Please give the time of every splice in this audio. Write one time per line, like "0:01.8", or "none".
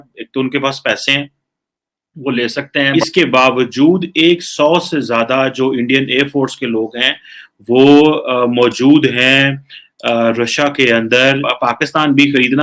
0:02.9
0:11.4